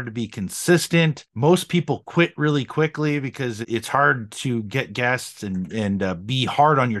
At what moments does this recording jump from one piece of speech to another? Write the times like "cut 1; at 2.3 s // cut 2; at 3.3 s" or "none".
cut 1; at 1.2 s // cut 2; at 3.7 s